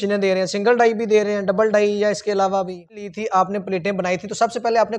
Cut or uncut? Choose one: cut